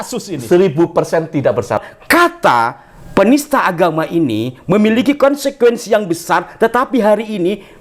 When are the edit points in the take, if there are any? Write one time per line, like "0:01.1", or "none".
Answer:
0:01.9